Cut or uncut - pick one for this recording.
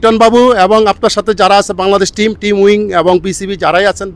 uncut